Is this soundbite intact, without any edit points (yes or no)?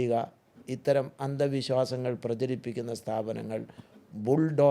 yes